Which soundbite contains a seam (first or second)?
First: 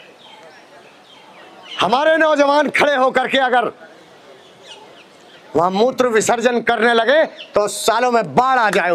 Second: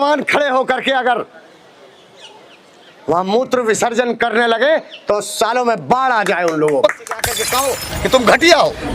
second